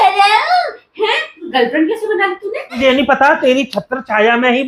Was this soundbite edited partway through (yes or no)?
yes